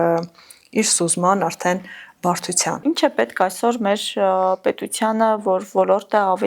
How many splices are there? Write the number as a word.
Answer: one